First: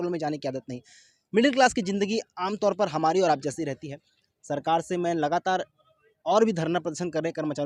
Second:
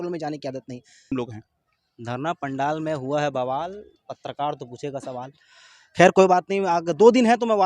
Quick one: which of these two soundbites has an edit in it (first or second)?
second